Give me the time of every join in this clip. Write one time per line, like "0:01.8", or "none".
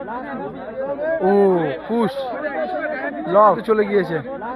0:03.6